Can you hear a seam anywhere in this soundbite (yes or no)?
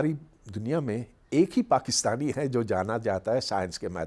no